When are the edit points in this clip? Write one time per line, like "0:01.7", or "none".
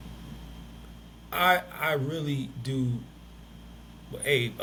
none